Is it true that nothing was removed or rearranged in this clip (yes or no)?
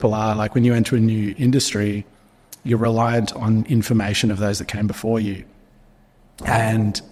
yes